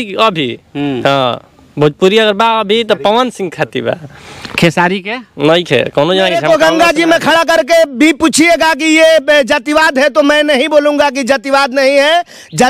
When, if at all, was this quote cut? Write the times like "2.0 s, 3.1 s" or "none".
6.4 s